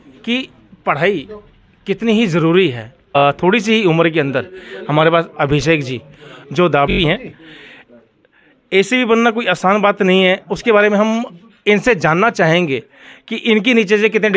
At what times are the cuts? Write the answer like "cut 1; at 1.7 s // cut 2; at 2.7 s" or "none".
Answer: cut 1; at 3.2 s // cut 2; at 6.9 s